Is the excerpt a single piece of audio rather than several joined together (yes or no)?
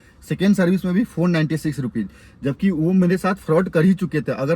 yes